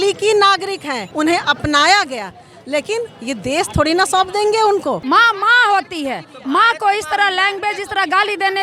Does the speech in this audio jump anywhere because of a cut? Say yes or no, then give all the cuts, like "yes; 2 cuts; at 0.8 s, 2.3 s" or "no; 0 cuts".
yes; 2 cuts; at 1.0 s, 5.0 s